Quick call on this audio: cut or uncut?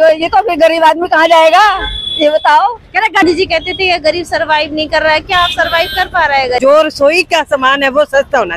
cut